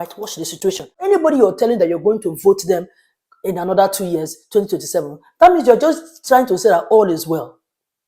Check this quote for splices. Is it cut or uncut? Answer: cut